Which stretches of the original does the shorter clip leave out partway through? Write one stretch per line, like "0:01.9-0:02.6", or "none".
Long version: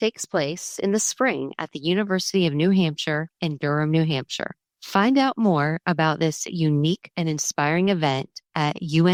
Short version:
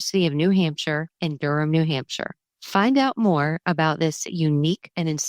none